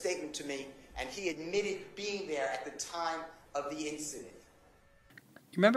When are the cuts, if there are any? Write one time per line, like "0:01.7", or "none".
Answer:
none